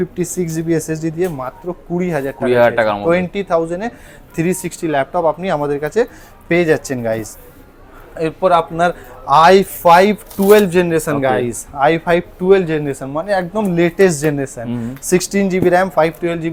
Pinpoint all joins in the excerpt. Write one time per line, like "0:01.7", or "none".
none

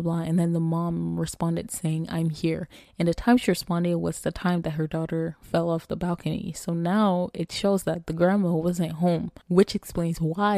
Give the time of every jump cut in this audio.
0:09.4

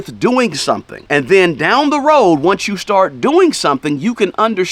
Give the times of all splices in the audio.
none

